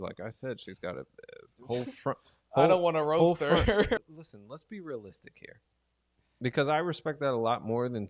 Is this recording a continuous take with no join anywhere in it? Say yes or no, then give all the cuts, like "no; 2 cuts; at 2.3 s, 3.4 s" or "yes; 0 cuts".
no; 1 cut; at 4.0 s